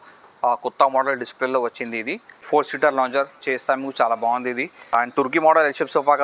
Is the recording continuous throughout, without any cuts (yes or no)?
no